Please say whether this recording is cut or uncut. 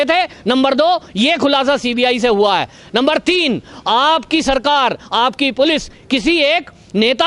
uncut